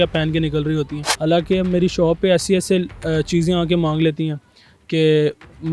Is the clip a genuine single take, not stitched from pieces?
no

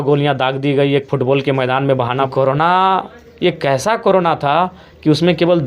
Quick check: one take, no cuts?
no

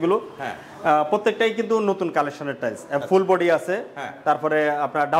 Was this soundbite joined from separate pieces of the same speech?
no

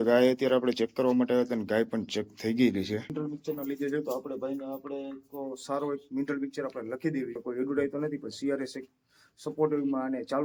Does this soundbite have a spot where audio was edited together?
no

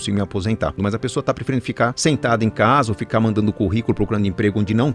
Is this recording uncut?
no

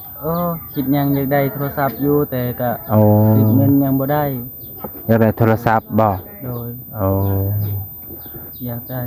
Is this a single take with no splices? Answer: yes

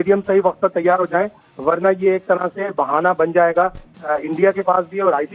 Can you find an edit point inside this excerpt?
no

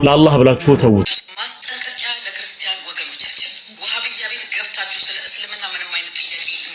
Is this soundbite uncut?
no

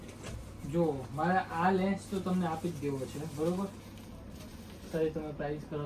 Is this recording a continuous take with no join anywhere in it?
yes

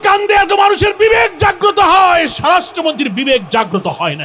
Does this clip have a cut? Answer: no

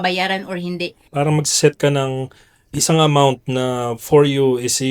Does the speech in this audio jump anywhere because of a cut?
yes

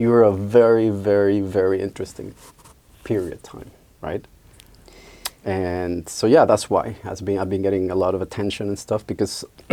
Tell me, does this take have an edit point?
no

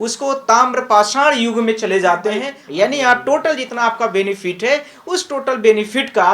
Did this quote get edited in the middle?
yes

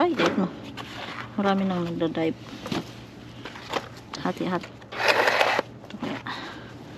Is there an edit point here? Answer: yes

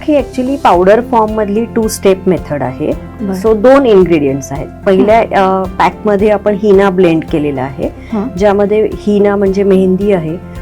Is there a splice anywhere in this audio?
no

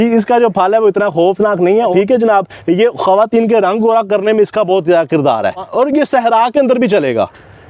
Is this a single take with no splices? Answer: no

